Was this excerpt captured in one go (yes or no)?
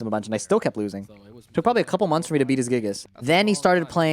no